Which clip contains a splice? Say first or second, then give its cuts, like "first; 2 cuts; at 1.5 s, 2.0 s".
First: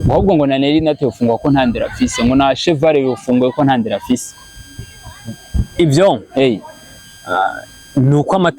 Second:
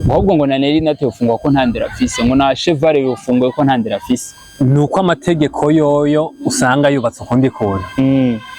second; 1 cut; at 4.4 s